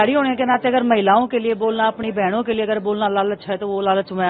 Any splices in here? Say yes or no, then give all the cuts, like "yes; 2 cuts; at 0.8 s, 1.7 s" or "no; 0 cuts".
no; 0 cuts